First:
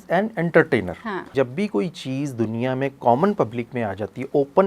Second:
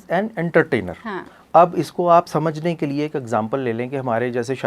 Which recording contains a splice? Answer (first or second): first